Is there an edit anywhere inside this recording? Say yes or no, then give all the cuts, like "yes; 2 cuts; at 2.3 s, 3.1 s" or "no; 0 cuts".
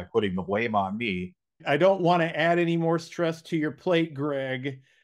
yes; 1 cut; at 1.6 s